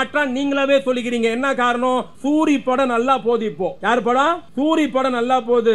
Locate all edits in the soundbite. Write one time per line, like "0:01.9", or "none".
0:02.1
0:03.8
0:04.5